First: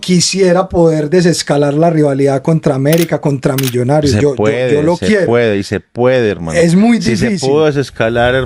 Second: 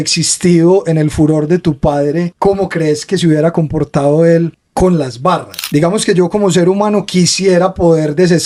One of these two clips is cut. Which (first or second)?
second